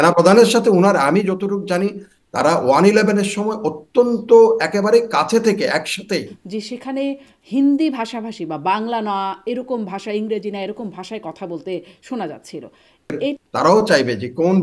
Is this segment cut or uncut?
cut